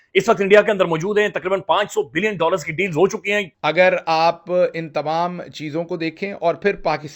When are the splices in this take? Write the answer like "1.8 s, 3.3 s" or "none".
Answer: 3.5 s